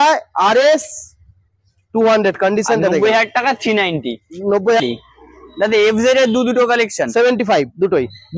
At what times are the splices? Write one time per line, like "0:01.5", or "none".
0:04.8